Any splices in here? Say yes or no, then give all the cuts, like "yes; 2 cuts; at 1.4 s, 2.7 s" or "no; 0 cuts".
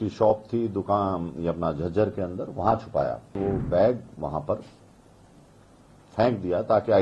yes; 1 cut; at 3.3 s